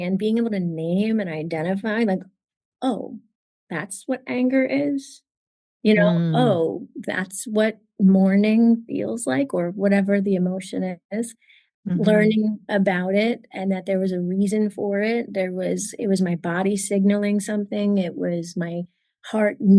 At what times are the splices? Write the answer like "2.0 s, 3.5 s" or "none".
none